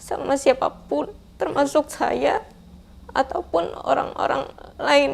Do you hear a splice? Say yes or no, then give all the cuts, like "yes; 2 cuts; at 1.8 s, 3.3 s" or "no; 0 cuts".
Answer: no; 0 cuts